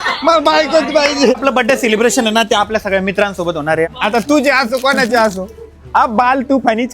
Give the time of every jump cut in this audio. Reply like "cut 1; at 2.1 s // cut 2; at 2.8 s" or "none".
cut 1; at 1.3 s // cut 2; at 3.9 s